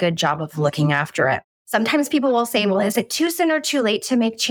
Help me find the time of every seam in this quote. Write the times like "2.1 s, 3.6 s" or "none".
1.6 s